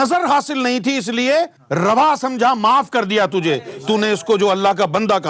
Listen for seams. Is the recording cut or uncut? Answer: cut